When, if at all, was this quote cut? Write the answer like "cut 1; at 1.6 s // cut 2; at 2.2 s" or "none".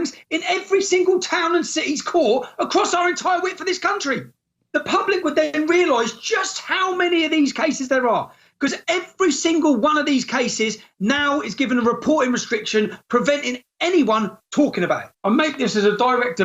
cut 1; at 15.1 s